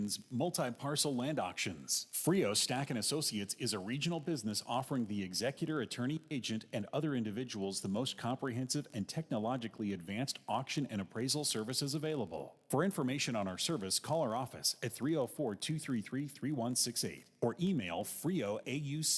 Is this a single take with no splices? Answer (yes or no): yes